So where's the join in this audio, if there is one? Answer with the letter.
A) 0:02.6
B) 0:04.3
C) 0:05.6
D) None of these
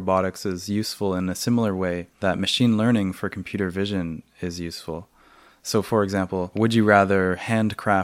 D